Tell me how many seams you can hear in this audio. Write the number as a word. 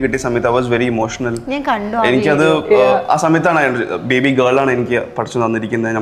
zero